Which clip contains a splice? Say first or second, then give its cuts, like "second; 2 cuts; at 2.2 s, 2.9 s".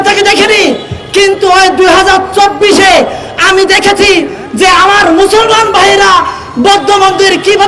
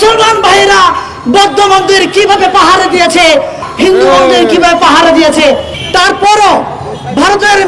second; 2 cuts; at 3.7 s, 5.7 s